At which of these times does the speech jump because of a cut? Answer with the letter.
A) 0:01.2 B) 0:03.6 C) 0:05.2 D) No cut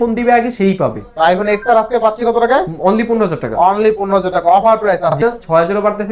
C